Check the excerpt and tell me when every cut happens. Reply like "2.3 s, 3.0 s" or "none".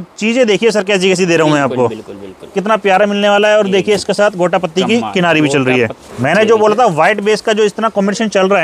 2.5 s, 6.0 s